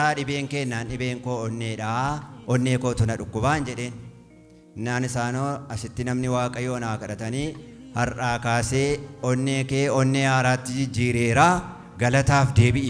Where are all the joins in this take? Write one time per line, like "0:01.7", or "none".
none